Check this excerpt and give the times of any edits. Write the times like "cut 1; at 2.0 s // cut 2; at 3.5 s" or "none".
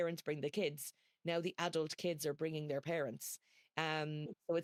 none